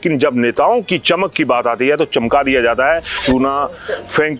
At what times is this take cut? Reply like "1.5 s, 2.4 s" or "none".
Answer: 3.2 s